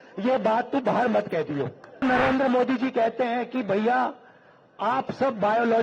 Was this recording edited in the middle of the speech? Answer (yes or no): yes